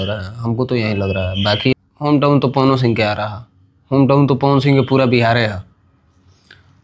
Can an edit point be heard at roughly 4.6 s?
no; 1 cut; at 1.7 s

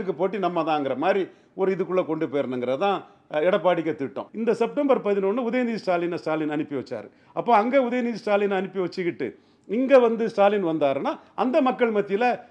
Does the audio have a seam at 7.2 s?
no; 1 cut; at 4.2 s

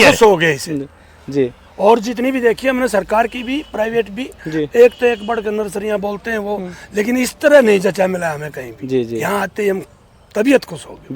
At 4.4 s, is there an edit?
no; 0 cuts

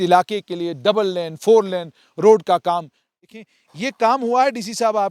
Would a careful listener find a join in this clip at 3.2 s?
yes; 1 cut; at 3.2 s

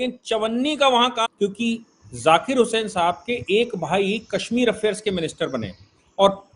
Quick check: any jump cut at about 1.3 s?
yes; 1 cut; at 1.3 s

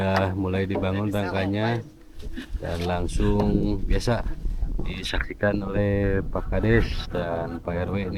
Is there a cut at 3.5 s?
no; 0 cuts

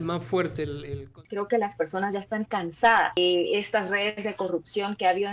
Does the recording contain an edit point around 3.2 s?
yes; 2 cuts; at 1.1 s, 3.2 s

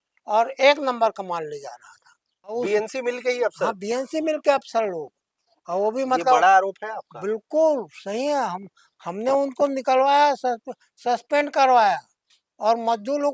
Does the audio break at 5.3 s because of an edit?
no; 1 cut; at 2.5 s

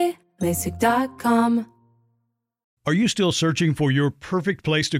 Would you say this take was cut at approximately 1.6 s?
no; 0 cuts

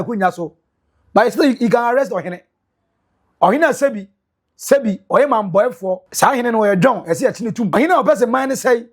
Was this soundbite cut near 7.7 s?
yes; 2 cuts; at 6.1 s, 7.7 s

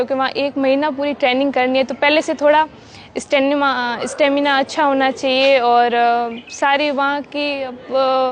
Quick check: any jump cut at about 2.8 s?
no; 0 cuts

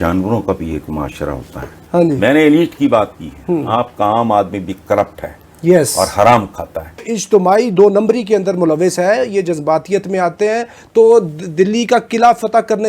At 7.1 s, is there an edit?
yes; 2 cuts; at 1.8 s, 7.1 s

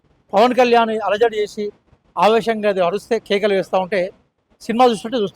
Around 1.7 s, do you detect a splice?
no; 0 cuts

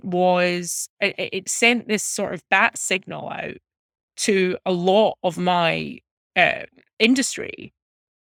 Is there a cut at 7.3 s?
no; 0 cuts

